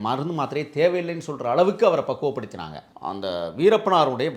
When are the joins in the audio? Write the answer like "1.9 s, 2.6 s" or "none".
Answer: 2.8 s